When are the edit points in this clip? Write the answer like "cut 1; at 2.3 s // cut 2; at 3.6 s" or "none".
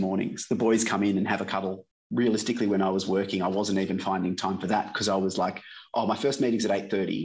cut 1; at 1.9 s